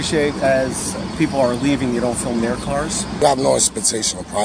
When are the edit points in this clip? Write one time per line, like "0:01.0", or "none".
0:03.2